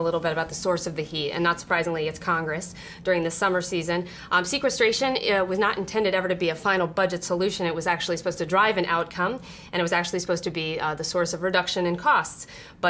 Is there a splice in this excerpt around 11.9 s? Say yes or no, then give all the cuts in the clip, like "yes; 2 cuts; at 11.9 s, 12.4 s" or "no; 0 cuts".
yes; 1 cut; at 11.9 s